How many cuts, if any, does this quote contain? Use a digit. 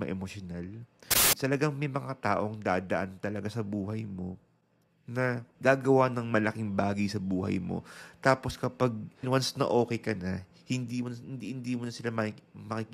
3